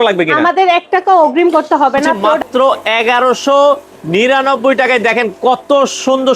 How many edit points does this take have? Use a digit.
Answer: 1